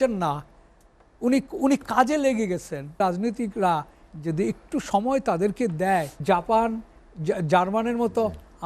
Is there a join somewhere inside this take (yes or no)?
yes